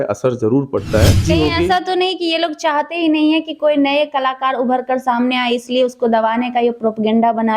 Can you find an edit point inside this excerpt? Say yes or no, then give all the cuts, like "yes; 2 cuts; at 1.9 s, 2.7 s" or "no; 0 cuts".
yes; 1 cut; at 1.2 s